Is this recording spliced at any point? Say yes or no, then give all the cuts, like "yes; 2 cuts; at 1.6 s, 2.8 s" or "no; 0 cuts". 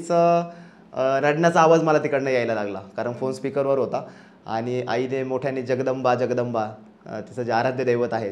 no; 0 cuts